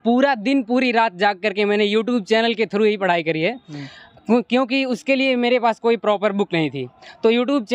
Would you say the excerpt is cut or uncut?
uncut